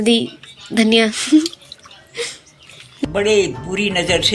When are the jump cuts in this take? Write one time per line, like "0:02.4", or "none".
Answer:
0:02.8